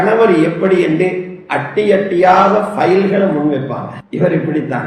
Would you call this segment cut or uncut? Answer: cut